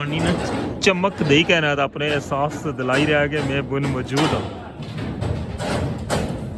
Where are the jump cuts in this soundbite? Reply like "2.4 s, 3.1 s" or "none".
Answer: 5.2 s